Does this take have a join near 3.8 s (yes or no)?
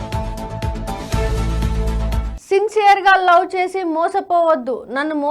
no